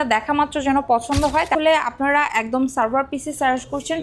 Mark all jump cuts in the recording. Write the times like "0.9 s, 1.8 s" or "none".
1.5 s